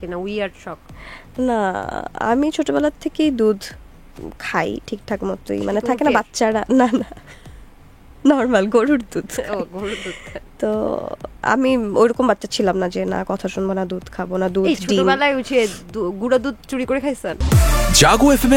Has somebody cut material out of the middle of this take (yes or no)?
yes